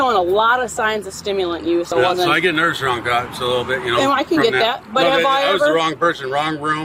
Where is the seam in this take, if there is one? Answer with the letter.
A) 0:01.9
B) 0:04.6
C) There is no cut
A